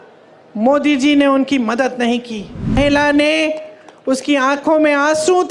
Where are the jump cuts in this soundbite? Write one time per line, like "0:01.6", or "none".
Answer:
0:02.8